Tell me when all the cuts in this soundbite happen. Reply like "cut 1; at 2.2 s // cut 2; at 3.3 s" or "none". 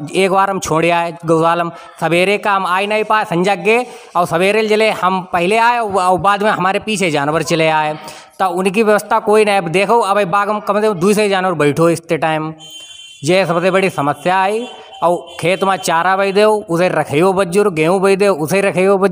none